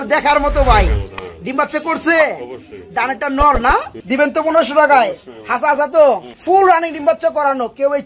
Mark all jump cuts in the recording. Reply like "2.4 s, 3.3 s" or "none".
4.0 s, 6.3 s